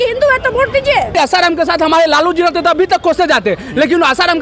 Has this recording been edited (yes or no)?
yes